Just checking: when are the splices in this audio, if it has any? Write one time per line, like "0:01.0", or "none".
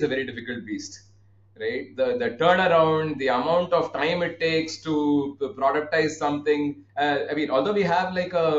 0:06.8